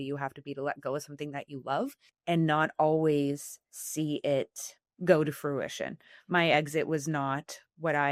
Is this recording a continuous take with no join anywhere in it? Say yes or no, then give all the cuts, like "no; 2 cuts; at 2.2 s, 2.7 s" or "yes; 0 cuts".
yes; 0 cuts